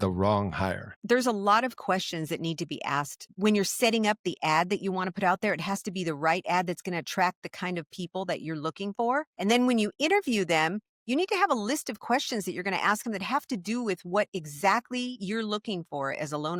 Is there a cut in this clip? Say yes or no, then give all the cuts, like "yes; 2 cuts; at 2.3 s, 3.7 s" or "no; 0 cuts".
no; 0 cuts